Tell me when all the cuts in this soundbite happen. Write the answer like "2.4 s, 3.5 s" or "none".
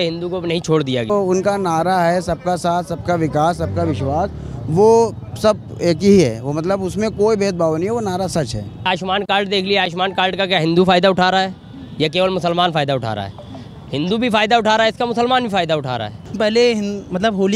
1.1 s, 8.9 s, 16.4 s